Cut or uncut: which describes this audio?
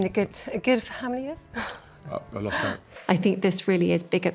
uncut